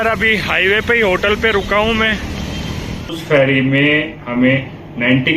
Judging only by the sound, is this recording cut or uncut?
cut